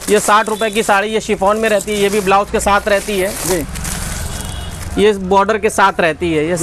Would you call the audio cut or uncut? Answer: uncut